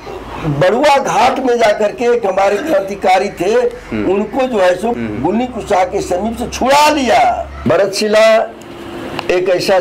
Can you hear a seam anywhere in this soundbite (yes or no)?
yes